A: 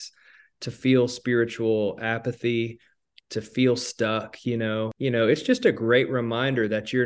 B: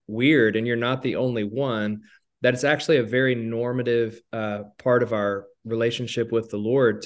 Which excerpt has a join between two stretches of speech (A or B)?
A